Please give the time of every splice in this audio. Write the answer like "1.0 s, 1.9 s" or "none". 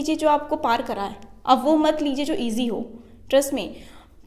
none